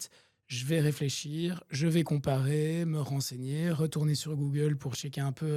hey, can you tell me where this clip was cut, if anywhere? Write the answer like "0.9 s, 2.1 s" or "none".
none